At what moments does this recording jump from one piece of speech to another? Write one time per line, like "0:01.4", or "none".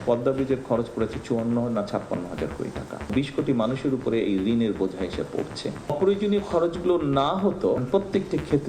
0:03.1
0:05.9
0:07.8